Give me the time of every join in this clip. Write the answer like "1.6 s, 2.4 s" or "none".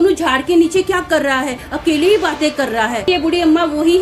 3.1 s

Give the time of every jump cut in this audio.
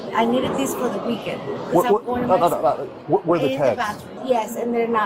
4.1 s

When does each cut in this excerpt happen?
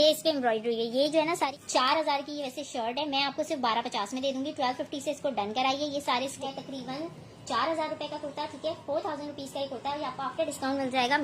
1.5 s, 6.3 s

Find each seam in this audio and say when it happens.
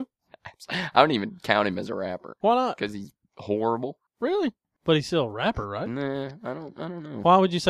2.3 s, 4.7 s

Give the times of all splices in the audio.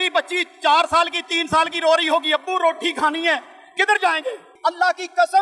4.5 s

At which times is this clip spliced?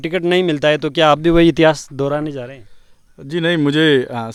none

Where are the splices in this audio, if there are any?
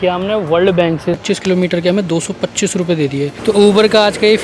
1.2 s, 3.4 s

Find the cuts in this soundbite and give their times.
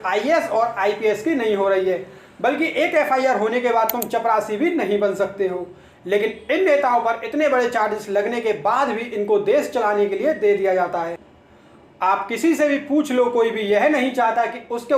none

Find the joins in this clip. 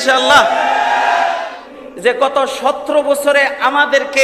1.5 s

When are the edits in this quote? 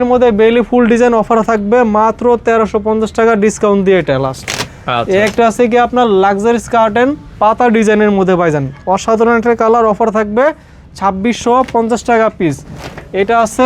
none

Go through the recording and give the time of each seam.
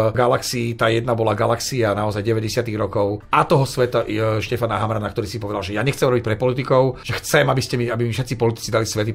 3.2 s, 7.1 s

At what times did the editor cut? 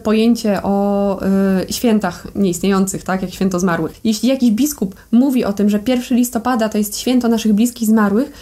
3.9 s

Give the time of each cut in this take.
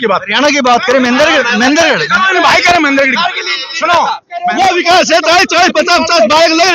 4.3 s

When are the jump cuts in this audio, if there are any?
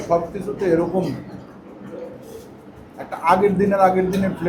none

